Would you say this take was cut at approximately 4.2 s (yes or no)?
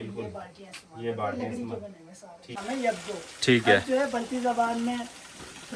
no